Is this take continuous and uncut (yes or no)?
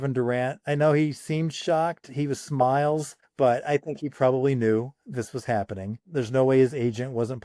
no